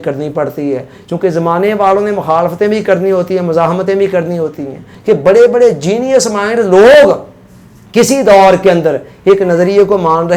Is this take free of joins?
no; 1 cut; at 4.9 s

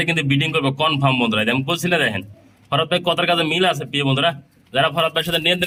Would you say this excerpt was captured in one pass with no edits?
yes; 0 cuts

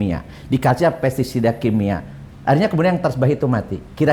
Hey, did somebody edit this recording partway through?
no; 0 cuts

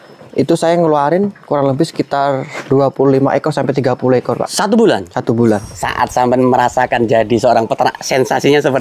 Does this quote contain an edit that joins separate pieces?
yes; 1 cut; at 5.7 s

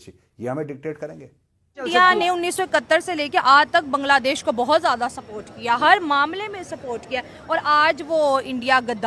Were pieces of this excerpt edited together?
yes; 1 cut; at 1.8 s

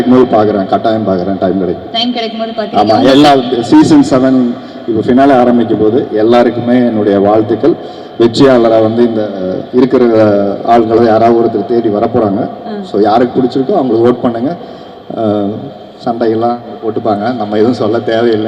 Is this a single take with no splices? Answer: yes; 0 cuts

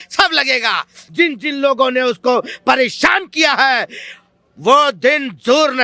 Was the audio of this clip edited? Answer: yes; 1 cut; at 1.0 s

